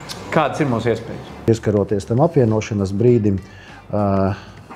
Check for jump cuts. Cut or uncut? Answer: cut